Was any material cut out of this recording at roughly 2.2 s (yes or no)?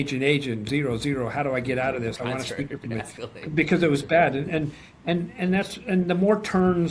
no